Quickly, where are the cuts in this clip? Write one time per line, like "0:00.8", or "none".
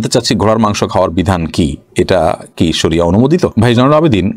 none

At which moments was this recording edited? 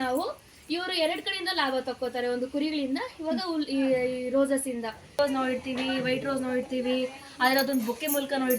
0:05.2

